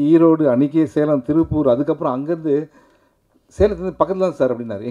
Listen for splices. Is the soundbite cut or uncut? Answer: uncut